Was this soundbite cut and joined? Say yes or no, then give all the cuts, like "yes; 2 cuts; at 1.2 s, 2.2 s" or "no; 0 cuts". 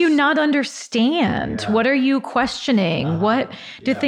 no; 0 cuts